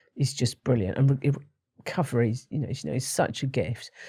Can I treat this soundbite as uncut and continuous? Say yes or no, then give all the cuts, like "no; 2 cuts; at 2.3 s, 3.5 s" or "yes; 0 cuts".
yes; 0 cuts